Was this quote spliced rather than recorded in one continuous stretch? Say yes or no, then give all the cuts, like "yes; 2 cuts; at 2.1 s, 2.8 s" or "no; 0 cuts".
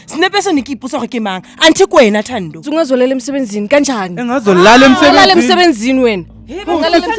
yes; 1 cut; at 2.6 s